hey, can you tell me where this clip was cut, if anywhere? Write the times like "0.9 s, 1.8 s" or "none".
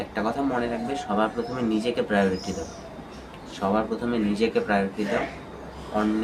none